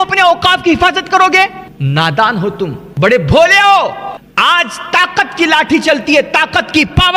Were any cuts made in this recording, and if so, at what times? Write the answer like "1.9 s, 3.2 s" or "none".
1.7 s, 2.8 s, 4.2 s